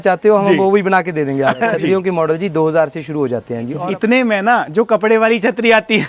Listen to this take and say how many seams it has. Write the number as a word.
two